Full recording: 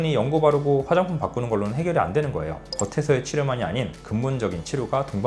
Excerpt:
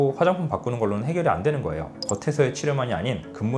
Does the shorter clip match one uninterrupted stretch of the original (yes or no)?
yes